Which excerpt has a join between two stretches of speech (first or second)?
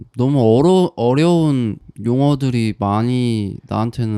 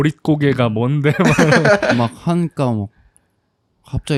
first